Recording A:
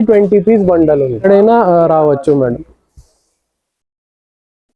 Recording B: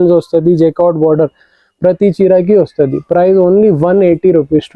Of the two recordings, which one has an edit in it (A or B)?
A